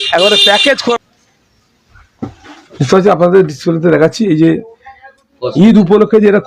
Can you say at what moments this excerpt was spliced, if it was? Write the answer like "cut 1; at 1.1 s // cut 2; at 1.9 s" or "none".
cut 1; at 0.9 s

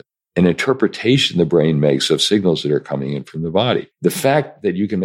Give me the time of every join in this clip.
cut 1; at 3.9 s

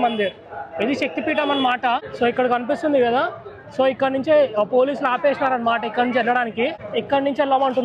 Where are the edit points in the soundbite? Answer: cut 1; at 2.1 s // cut 2; at 6.8 s

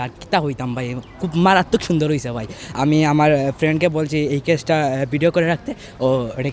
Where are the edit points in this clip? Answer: none

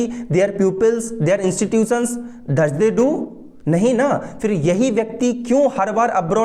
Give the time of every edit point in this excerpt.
none

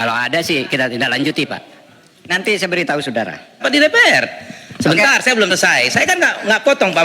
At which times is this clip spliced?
cut 1; at 3.6 s

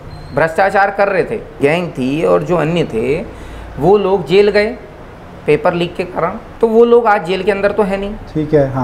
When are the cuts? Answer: cut 1; at 1.6 s // cut 2; at 6.4 s

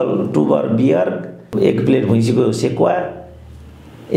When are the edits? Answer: cut 1; at 1.5 s

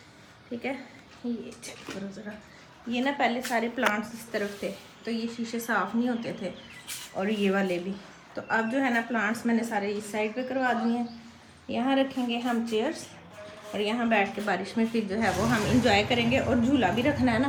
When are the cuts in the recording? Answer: none

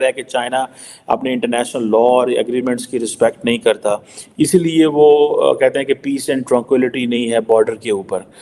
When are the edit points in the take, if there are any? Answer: none

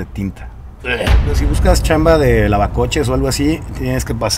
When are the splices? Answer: cut 1; at 1.4 s

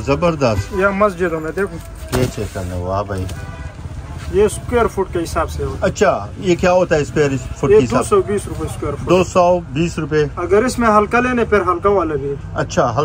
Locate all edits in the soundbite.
none

